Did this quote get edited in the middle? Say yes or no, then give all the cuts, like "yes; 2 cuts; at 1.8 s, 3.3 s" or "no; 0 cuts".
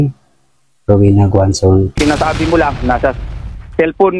yes; 1 cut; at 1.9 s